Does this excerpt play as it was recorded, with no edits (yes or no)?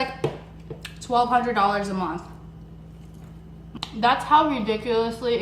no